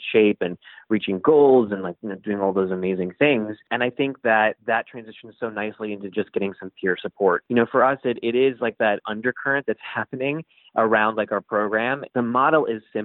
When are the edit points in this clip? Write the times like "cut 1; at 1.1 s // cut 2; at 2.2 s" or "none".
cut 1; at 3.7 s // cut 2; at 7.4 s // cut 3; at 9.0 s // cut 4; at 12.0 s